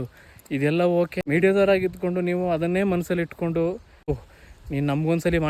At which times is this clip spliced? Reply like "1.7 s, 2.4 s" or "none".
1.2 s, 4.2 s